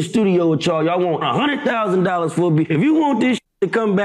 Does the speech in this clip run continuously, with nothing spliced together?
yes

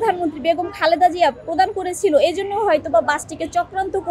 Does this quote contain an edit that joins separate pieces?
no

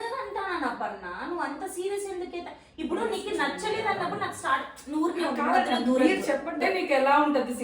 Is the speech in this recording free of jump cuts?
no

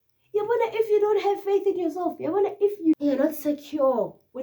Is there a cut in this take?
yes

